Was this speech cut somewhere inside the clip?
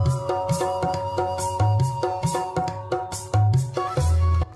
no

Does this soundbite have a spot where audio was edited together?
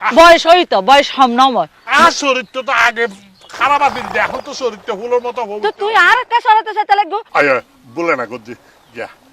yes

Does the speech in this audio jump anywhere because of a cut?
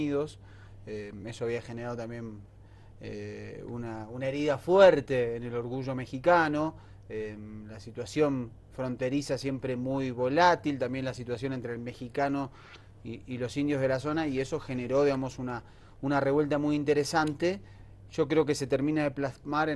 yes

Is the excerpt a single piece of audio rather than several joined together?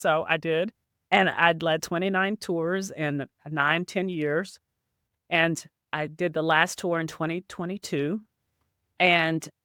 yes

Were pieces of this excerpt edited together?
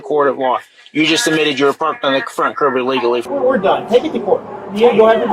yes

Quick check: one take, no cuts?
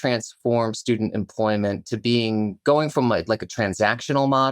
yes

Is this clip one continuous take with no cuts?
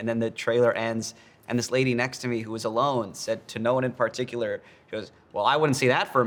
yes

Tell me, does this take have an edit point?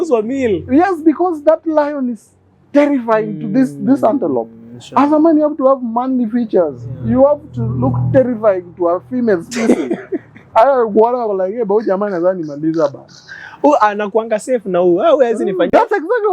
no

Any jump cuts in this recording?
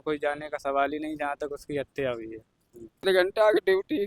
yes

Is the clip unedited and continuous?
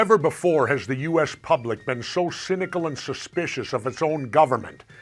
yes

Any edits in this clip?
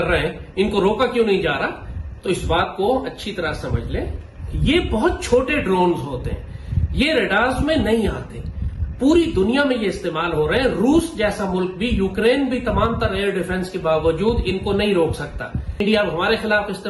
no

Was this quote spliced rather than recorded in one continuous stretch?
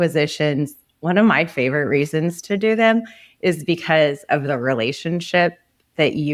no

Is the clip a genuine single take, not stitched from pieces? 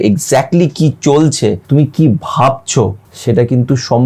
no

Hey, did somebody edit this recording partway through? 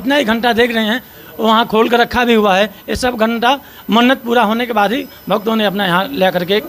no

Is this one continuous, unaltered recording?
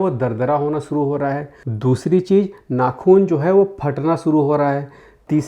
yes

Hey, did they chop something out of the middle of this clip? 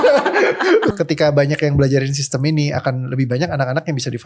yes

